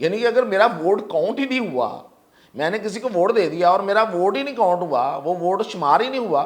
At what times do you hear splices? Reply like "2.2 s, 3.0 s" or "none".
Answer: none

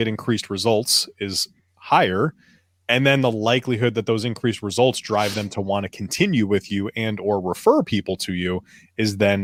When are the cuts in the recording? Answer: none

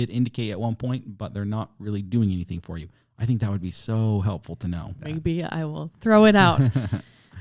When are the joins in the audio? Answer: 4.9 s

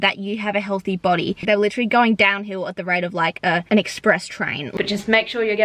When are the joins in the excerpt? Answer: 1.4 s, 3.6 s, 4.6 s

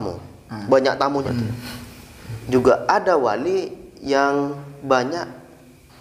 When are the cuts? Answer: 1.2 s

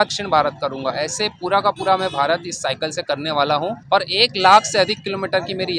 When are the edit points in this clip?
none

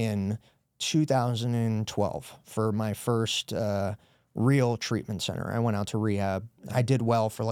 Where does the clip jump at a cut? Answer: 2.4 s, 6.5 s

